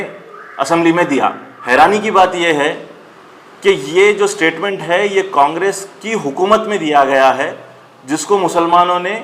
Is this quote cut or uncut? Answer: cut